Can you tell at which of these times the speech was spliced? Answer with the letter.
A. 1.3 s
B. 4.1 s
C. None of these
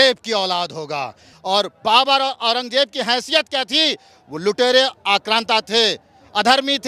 A